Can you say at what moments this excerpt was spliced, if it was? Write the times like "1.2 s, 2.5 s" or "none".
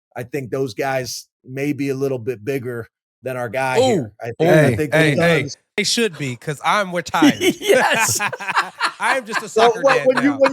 5.9 s